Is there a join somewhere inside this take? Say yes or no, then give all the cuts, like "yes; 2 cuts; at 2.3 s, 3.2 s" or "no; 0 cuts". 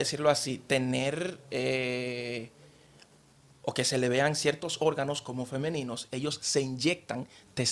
no; 0 cuts